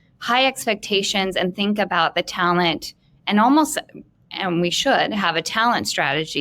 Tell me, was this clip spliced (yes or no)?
no